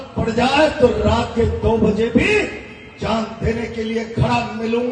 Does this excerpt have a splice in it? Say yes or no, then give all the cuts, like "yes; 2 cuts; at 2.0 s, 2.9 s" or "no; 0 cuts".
no; 0 cuts